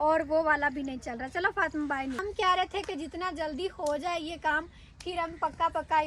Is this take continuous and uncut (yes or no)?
no